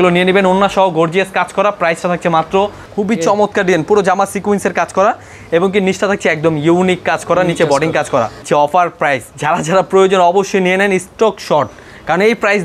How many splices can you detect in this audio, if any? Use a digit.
3